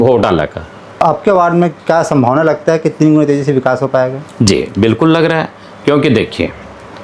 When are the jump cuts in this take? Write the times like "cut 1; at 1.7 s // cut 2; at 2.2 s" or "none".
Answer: cut 1; at 1.0 s